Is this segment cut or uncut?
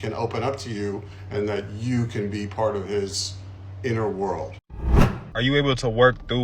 cut